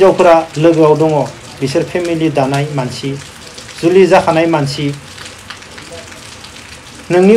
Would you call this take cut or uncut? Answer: uncut